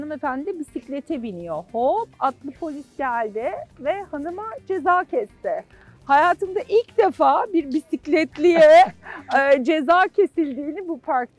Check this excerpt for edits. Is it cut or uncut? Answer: uncut